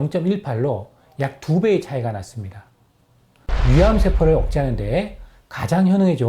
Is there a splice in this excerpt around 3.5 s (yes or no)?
yes